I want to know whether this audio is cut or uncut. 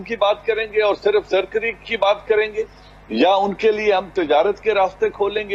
uncut